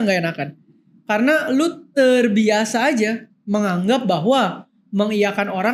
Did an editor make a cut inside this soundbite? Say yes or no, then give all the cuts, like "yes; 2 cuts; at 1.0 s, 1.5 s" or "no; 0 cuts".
no; 0 cuts